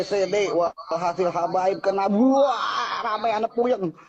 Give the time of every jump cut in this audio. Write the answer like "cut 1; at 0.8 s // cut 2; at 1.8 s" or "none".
none